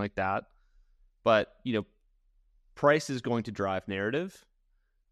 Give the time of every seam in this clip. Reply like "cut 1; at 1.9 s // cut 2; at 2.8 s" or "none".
none